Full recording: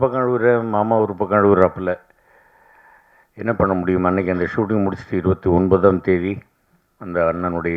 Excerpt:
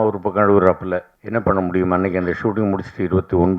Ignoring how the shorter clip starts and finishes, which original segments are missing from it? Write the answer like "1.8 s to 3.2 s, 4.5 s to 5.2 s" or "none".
2.1 s to 3.3 s